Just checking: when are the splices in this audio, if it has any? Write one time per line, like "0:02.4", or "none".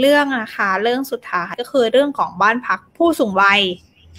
0:01.6